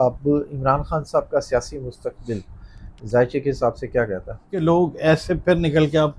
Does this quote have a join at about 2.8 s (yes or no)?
no